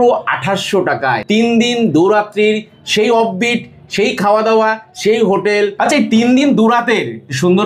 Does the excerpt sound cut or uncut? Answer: cut